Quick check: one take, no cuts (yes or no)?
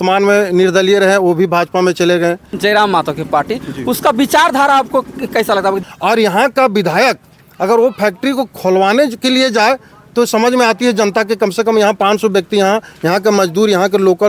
no